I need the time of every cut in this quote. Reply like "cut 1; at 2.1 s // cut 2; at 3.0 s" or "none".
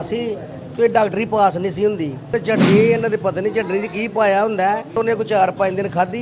cut 1; at 2.3 s // cut 2; at 5.0 s